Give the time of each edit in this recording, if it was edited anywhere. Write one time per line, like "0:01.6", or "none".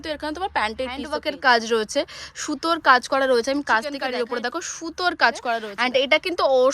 0:01.1
0:04.0
0:05.7